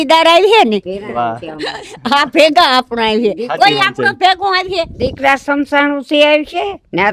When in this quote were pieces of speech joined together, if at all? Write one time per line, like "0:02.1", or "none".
none